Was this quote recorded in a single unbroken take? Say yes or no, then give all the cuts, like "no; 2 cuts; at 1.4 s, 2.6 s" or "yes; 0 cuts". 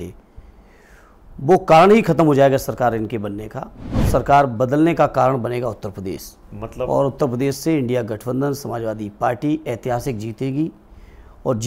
no; 1 cut; at 4.1 s